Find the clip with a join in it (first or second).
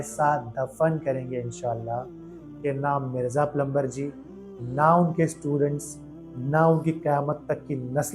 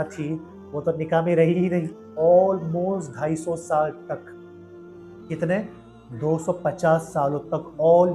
second